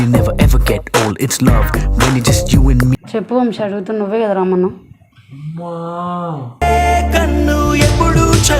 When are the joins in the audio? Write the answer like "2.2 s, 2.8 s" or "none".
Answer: 3.0 s